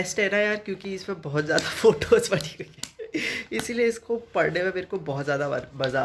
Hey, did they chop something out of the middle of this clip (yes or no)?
no